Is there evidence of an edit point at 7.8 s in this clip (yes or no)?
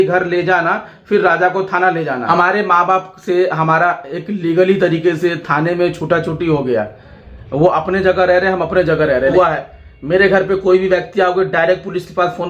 no